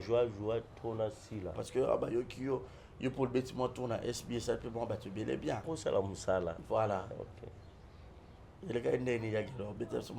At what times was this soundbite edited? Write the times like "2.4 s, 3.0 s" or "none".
1.6 s, 5.7 s